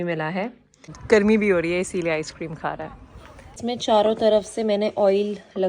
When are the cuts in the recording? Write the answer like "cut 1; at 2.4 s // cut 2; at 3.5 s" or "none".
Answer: cut 1; at 1.0 s // cut 2; at 3.6 s